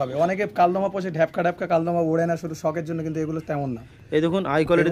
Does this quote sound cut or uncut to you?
uncut